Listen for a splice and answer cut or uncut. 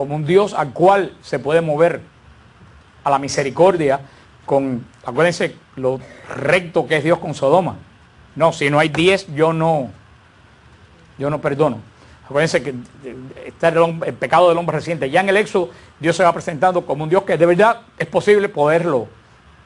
uncut